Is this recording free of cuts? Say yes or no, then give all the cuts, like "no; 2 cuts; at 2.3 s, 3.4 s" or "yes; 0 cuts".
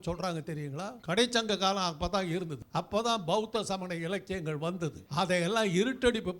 no; 3 cuts; at 1.0 s, 2.6 s, 5.0 s